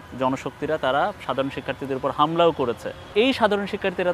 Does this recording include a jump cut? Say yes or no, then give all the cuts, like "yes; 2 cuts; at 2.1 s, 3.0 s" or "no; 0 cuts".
yes; 1 cut; at 3.1 s